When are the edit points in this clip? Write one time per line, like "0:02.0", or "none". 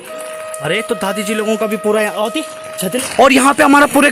0:03.0